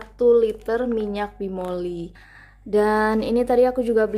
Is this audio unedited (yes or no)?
no